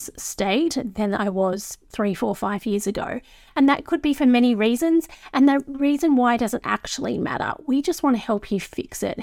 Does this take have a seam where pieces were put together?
yes; 1 cut; at 1.9 s

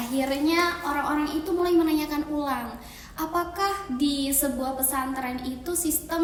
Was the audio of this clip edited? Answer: no; 0 cuts

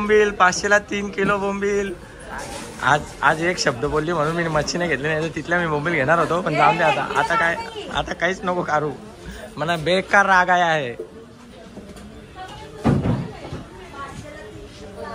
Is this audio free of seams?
yes; 0 cuts

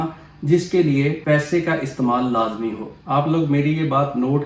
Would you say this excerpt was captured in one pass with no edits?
no; 2 cuts; at 1.2 s, 2.9 s

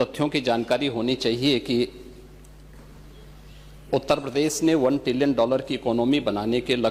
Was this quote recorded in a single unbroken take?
yes; 0 cuts

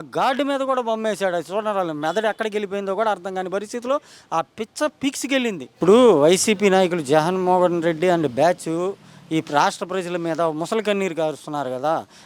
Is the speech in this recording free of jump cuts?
no; 1 cut; at 5.8 s

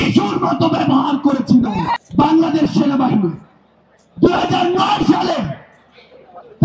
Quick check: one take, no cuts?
no; 1 cut; at 1.9 s

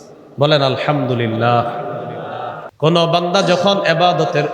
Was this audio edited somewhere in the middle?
yes; 1 cut; at 2.6 s

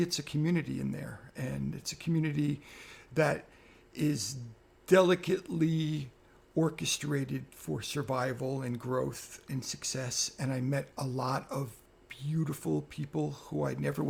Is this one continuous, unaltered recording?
yes; 0 cuts

